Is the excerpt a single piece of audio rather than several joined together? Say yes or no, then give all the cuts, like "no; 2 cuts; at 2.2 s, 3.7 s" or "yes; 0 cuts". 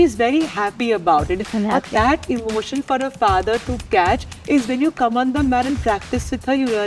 no; 1 cut; at 1.5 s